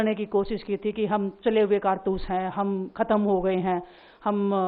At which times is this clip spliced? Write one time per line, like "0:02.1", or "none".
none

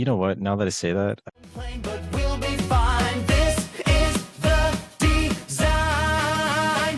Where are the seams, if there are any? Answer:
0:01.2

